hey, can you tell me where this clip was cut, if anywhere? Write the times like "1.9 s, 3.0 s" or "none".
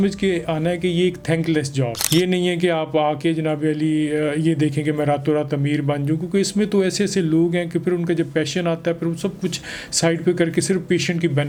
none